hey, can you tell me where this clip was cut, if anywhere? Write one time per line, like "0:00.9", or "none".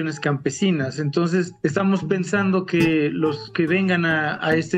0:01.5